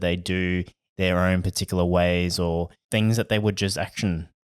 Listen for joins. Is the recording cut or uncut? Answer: uncut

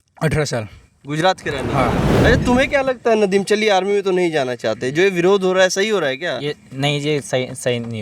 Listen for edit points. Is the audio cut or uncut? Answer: cut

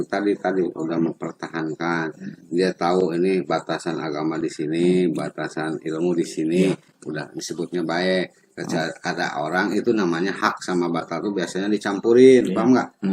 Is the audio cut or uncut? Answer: uncut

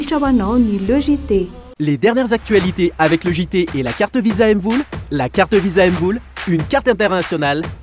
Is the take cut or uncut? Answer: cut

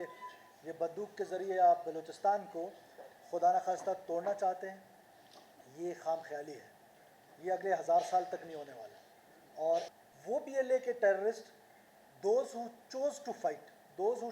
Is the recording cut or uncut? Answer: cut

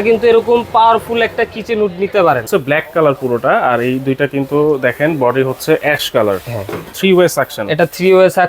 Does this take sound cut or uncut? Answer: cut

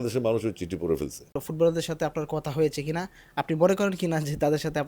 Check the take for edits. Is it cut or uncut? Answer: cut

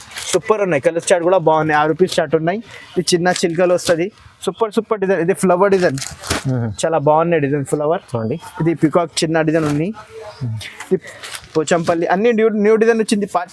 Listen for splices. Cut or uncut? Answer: uncut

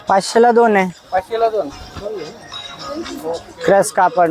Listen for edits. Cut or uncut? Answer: uncut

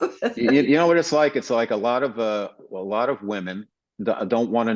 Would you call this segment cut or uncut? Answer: uncut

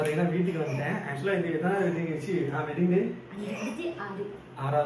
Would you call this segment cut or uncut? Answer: uncut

